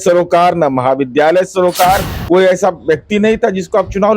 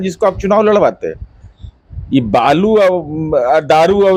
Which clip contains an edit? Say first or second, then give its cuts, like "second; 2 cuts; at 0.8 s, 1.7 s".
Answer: first; 1 cut; at 2.1 s